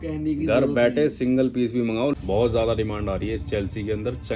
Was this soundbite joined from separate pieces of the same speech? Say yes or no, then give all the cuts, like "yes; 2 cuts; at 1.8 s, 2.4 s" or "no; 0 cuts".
yes; 1 cut; at 2.1 s